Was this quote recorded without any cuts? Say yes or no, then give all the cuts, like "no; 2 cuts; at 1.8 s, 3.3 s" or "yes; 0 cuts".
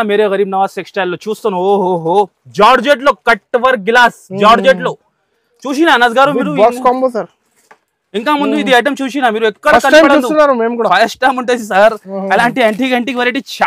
yes; 0 cuts